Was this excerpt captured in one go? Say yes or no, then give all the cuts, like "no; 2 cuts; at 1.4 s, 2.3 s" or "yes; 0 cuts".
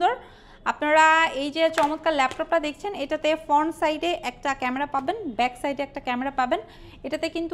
yes; 0 cuts